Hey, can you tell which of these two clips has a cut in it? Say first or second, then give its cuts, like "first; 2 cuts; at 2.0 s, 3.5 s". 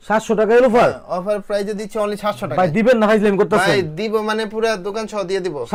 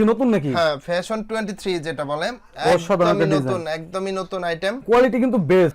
second; 1 cut; at 4.8 s